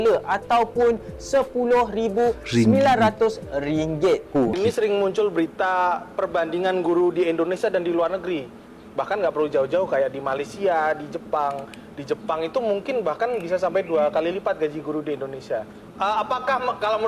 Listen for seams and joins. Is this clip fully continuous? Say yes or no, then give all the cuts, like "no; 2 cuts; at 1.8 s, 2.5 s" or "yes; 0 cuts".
no; 1 cut; at 4.5 s